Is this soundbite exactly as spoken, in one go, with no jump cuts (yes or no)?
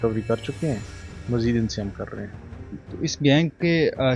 yes